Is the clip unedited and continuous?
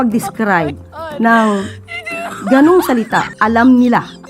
no; 1 cut; at 3.3 s

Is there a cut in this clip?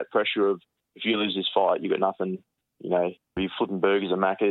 yes; 1 cut; at 3.4 s

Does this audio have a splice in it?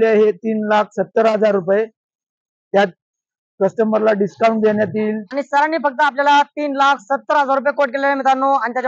no; 0 cuts

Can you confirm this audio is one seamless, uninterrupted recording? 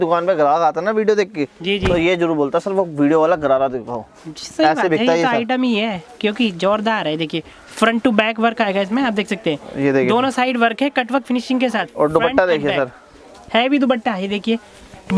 yes; 0 cuts

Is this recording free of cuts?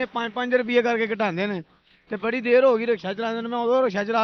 yes; 0 cuts

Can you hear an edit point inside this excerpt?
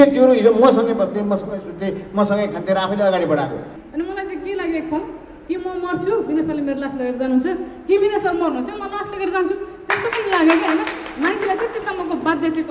yes; 1 cut; at 3.8 s

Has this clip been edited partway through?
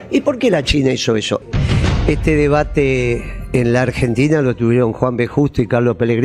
yes; 1 cut; at 1.4 s

